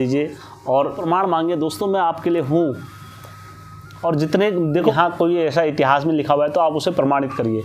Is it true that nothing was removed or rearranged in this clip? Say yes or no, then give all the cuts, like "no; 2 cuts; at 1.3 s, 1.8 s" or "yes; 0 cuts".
no; 2 cuts; at 1.0 s, 4.9 s